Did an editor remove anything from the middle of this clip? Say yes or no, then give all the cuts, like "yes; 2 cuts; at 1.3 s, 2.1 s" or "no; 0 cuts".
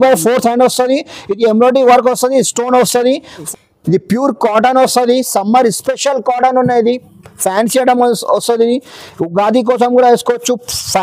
yes; 1 cut; at 3.5 s